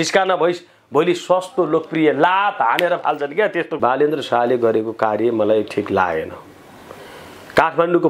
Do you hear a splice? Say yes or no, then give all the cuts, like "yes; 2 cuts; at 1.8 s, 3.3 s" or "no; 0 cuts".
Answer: yes; 1 cut; at 3.8 s